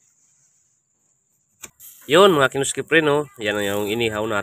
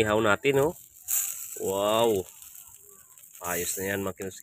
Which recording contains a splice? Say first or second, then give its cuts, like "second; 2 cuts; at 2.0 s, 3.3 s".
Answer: first; 1 cut; at 1.9 s